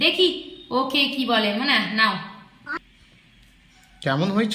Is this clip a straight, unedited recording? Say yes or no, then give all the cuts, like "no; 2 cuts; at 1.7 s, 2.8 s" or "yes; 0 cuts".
no; 1 cut; at 2.6 s